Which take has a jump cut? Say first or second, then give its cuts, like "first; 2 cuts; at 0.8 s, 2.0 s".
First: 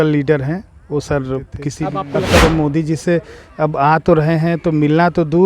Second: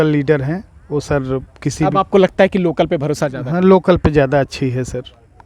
first; 1 cut; at 1.9 s